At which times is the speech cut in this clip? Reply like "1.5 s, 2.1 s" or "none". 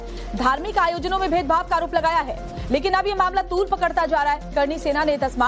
1.0 s

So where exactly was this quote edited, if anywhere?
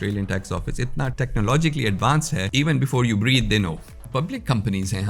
1.1 s, 2.5 s, 4.0 s

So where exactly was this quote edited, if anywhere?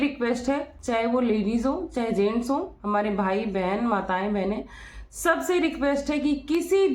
none

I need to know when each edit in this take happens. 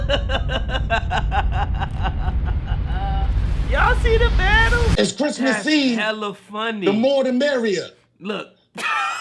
4.9 s

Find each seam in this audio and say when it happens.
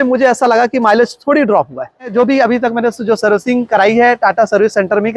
2.1 s

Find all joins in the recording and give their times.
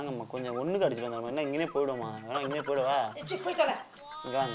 none

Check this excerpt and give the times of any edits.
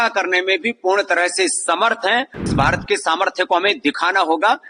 2.5 s

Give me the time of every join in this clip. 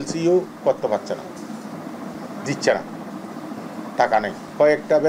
none

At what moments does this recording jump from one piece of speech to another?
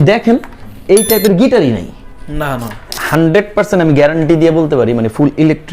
3.0 s

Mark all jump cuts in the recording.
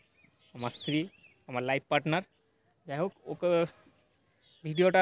none

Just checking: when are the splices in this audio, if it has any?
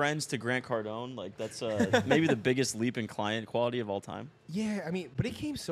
4.4 s

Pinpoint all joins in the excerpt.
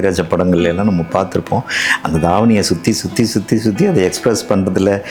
none

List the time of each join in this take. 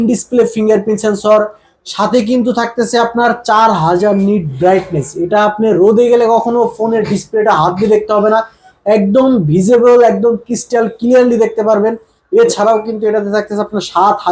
none

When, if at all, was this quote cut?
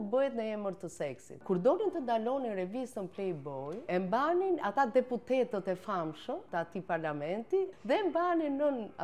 1.3 s, 3.9 s, 6.4 s, 7.7 s

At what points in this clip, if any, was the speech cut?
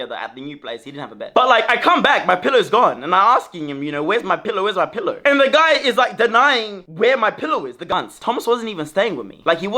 1.2 s, 7.9 s

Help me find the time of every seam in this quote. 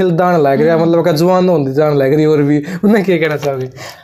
none

